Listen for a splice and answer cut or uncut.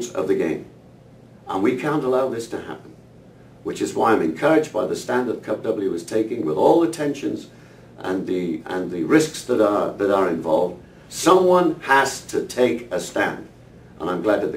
uncut